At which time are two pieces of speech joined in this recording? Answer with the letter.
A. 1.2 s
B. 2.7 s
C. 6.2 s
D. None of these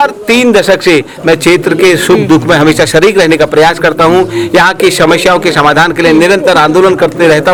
D